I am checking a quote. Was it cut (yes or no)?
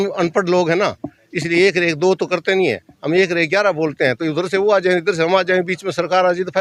no